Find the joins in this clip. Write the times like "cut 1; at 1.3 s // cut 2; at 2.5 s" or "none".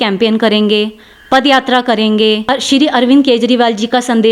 cut 1; at 2.4 s